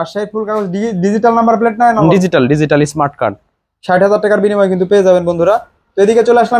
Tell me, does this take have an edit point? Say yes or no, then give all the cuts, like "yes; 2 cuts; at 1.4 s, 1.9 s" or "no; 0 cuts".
no; 0 cuts